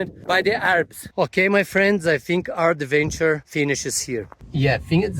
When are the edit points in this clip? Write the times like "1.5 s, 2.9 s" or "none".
1.1 s, 4.3 s